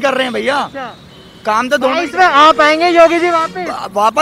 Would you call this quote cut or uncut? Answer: uncut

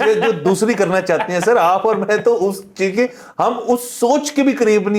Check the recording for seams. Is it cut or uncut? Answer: uncut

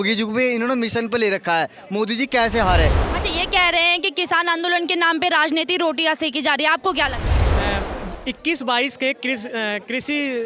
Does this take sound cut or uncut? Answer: cut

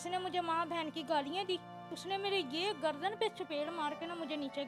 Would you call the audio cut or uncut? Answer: cut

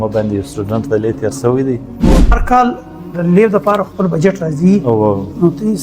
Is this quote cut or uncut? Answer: cut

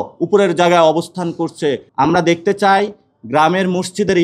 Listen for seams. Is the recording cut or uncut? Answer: cut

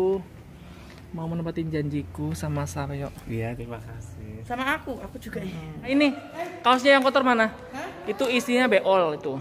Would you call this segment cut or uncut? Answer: cut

